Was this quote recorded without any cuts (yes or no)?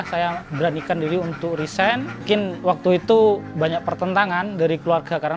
yes